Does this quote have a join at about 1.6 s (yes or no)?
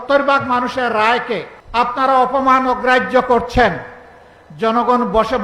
yes